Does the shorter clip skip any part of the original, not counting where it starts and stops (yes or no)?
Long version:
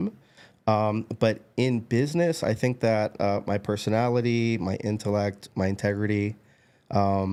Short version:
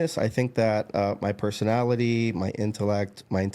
no